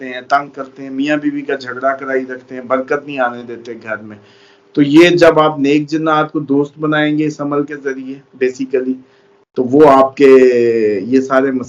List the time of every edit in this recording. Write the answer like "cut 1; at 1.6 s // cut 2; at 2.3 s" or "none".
none